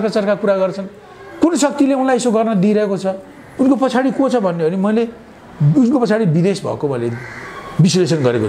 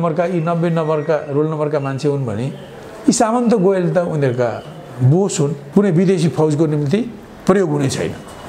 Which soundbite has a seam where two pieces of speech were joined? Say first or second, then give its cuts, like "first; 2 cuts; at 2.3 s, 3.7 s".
second; 1 cut; at 5.6 s